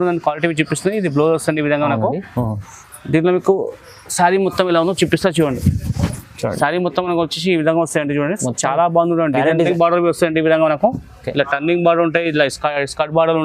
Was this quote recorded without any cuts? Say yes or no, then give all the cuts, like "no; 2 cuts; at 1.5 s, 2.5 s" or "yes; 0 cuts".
no; 1 cut; at 9.7 s